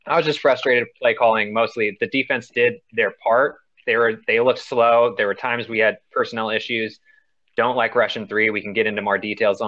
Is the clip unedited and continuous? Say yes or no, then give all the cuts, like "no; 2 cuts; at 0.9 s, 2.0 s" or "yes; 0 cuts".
yes; 0 cuts